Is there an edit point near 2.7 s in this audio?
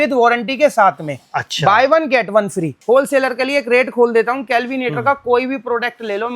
yes; 1 cut; at 2.7 s

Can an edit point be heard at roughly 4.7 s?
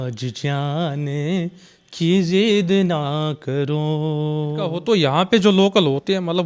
yes; 1 cut; at 4.7 s

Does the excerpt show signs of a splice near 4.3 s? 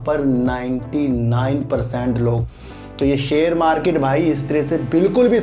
no; 1 cut; at 2.5 s

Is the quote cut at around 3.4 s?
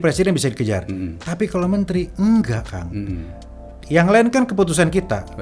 no; 0 cuts

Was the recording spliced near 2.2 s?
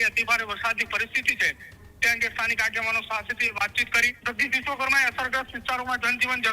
no; 1 cut; at 4.1 s

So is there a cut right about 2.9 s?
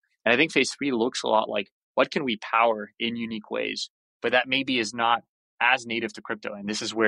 no; 0 cuts

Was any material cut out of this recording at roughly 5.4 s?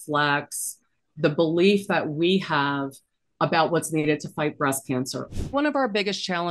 yes; 1 cut; at 5.4 s

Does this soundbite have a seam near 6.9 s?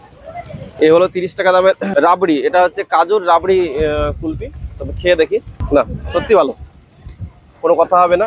no; 2 cuts; at 1.8 s, 5.6 s

